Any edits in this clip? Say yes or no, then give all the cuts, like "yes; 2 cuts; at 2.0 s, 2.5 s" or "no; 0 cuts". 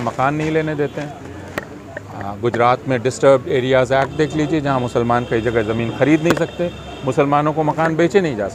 no; 0 cuts